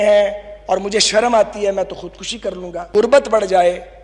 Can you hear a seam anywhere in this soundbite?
yes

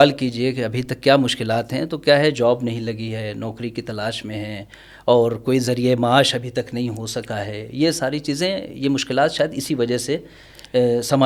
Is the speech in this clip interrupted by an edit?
no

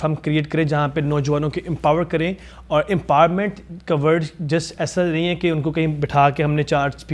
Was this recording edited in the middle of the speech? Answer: no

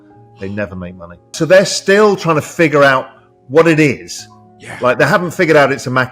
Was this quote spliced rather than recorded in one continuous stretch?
yes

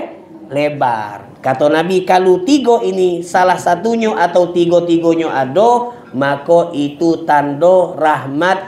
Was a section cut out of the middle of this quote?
no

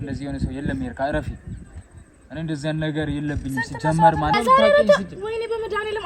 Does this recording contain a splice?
yes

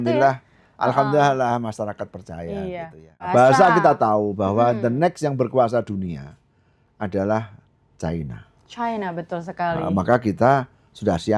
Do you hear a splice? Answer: yes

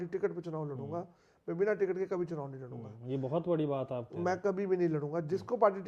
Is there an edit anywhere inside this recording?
no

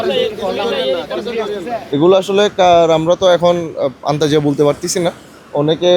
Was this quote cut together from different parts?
yes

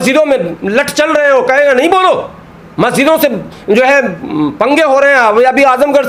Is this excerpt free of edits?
yes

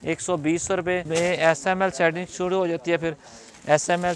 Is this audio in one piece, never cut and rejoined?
no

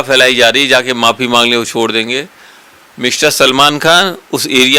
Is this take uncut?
yes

